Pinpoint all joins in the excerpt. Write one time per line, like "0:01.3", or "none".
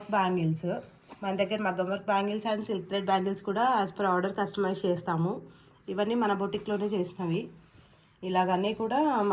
none